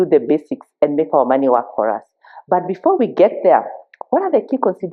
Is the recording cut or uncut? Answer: uncut